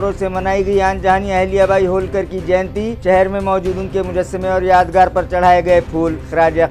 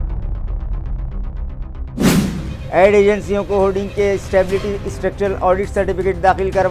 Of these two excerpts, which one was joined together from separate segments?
second; 1 cut; at 2.5 s

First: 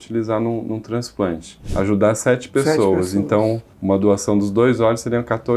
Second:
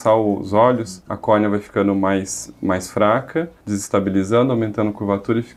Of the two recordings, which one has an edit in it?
first; 1 cut; at 1.6 s

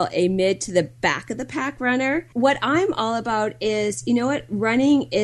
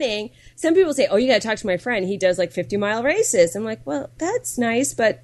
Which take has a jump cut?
first; 1 cut; at 2.3 s

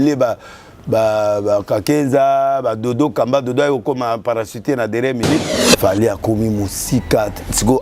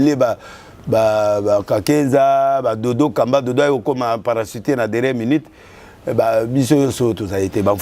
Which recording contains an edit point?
first; 1 cut; at 5.6 s

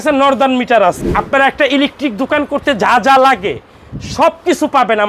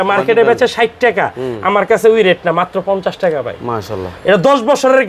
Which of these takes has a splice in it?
first; 1 cut; at 1.0 s

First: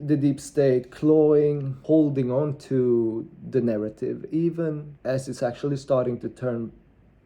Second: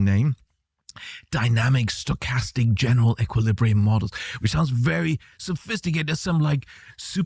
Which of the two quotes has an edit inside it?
first; 2 cuts; at 1.8 s, 4.9 s

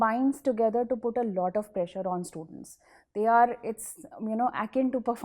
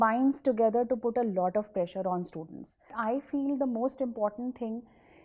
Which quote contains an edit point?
second; 1 cut; at 2.9 s

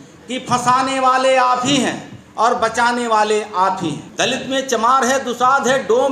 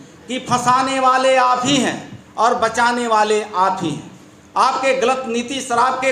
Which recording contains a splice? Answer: first; 1 cut; at 4.0 s

